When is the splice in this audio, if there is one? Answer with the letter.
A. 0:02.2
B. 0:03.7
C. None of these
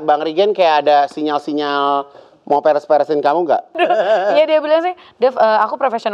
B